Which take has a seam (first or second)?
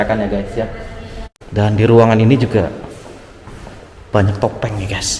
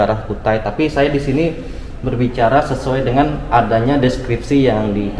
first